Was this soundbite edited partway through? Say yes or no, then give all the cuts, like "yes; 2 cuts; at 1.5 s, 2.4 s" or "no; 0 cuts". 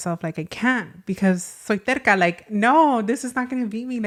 no; 0 cuts